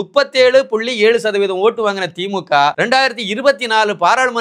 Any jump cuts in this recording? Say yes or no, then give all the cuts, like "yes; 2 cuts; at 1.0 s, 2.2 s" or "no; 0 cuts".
yes; 1 cut; at 2.8 s